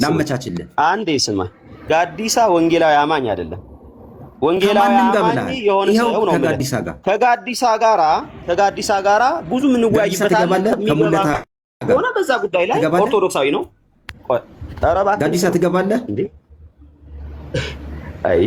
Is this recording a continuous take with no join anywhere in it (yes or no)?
yes